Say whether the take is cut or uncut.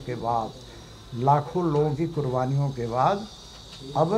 uncut